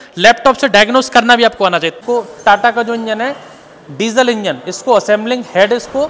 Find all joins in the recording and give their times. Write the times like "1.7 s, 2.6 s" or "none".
1.9 s